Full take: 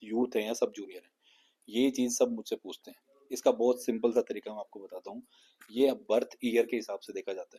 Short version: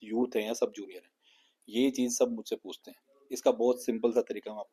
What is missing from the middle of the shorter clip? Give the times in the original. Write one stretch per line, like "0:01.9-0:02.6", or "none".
none